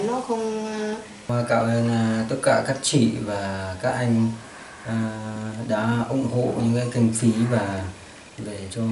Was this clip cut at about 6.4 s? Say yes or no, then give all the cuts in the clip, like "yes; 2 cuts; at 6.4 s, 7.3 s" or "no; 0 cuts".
no; 1 cut; at 1.3 s